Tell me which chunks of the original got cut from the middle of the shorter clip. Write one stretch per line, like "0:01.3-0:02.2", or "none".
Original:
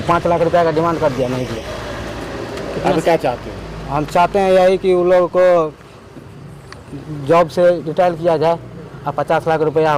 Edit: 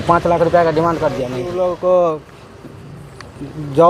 0:01.5-0:05.0